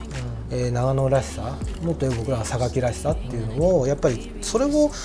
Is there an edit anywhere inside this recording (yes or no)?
no